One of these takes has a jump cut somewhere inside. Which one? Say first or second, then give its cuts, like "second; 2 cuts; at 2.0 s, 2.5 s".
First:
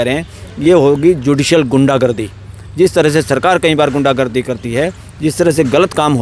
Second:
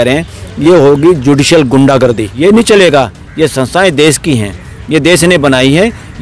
second; 1 cut; at 2.3 s